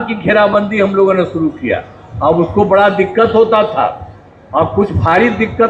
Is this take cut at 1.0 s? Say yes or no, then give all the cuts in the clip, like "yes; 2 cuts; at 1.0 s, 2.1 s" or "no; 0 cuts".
no; 0 cuts